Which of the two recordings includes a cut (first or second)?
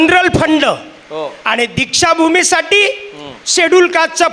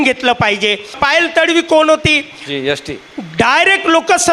second